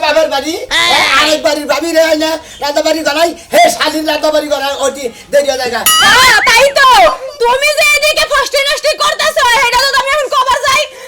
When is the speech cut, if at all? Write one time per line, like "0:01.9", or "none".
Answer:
0:06.0